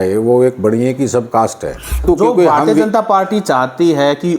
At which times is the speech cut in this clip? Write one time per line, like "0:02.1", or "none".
0:02.0

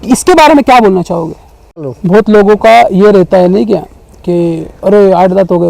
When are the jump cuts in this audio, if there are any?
0:02.0

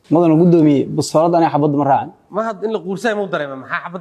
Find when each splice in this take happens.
0:02.2

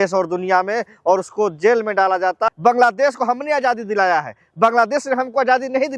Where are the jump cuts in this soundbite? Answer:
0:02.5

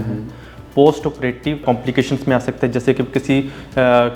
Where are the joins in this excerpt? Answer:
0:01.6

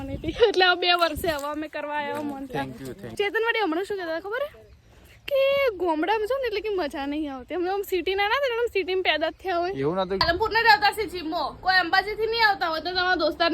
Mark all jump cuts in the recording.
0:03.1
0:10.2

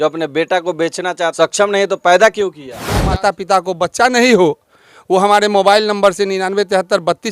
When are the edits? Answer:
0:01.3
0:03.1

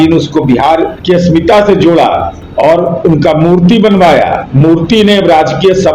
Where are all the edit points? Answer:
0:01.0
0:02.4
0:04.4

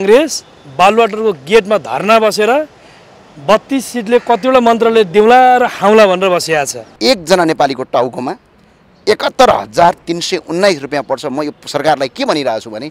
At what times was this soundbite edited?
0:06.8

